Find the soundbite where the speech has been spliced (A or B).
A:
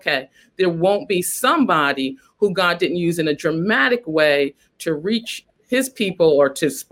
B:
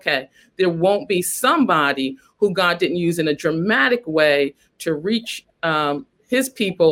A